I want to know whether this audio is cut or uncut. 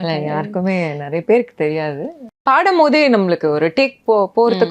cut